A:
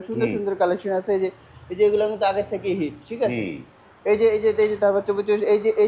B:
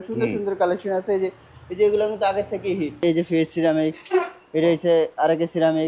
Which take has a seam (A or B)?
B